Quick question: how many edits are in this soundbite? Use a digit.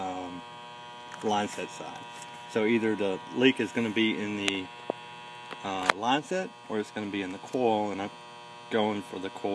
1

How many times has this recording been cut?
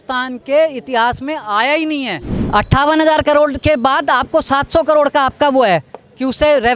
1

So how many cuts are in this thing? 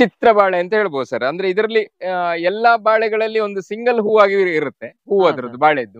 0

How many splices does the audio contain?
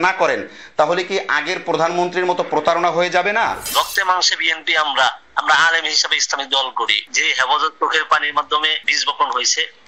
2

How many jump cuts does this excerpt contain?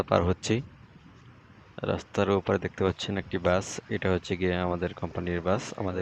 0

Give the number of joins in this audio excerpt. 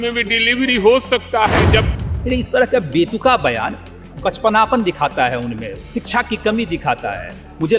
1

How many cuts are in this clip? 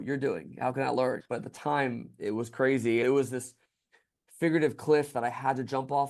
2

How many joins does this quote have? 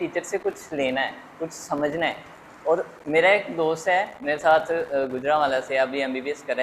0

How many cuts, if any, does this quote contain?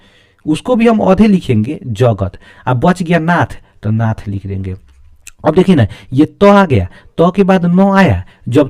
0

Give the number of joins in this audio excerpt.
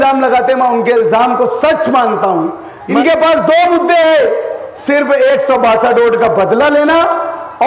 1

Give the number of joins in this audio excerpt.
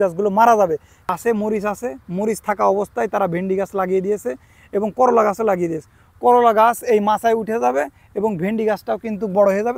1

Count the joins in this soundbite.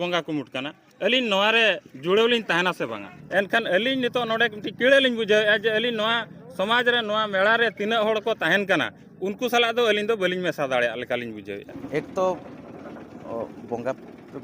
2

